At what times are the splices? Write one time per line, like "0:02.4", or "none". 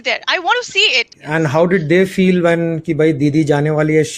0:01.2